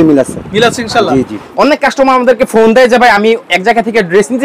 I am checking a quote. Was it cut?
yes; 1 cut; at 1.4 s

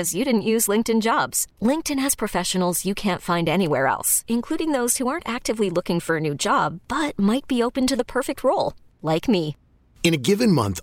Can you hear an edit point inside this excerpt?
no; 0 cuts

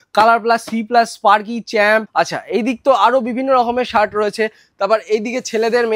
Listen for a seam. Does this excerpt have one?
yes; 1 cut; at 2.1 s

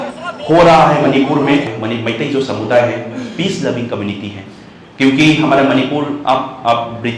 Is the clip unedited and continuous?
no; 1 cut; at 1.7 s

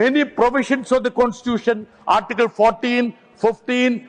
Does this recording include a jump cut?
no; 0 cuts

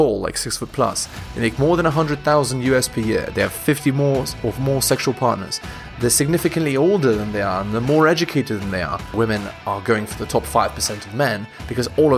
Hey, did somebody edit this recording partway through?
yes; 1 cut; at 9.1 s

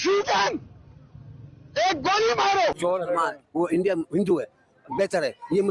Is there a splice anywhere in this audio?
yes; 1 cut; at 2.8 s

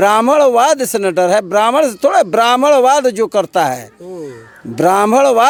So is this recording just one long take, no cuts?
yes; 0 cuts

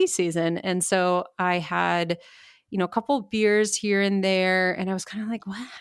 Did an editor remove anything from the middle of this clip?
no; 0 cuts

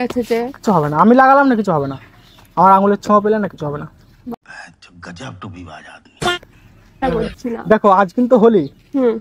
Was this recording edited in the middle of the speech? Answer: yes; 1 cut; at 7.0 s

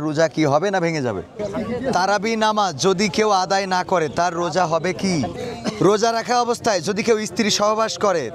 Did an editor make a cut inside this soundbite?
yes; 2 cuts; at 1.3 s, 5.3 s

